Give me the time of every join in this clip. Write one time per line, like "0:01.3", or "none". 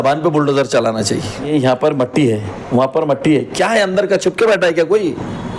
0:01.5